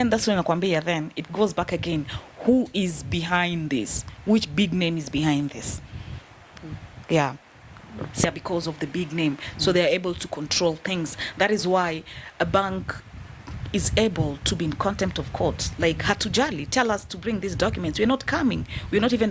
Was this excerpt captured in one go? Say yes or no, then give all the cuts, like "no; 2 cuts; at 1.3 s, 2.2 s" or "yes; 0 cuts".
no; 1 cut; at 8.2 s